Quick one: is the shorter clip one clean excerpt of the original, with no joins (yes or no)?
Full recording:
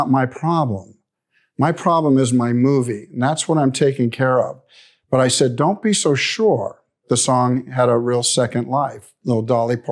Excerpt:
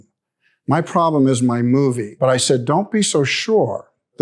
no